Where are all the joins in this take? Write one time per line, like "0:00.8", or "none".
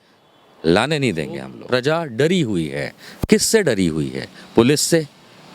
0:01.5